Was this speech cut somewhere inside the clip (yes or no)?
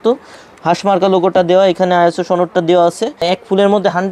yes